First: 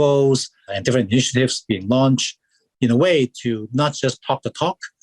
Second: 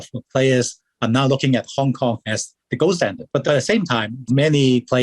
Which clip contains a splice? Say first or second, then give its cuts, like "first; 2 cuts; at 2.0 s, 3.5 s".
second; 2 cuts; at 3.2 s, 4.2 s